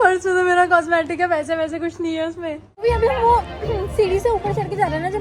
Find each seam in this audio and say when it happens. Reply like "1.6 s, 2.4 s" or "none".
2.7 s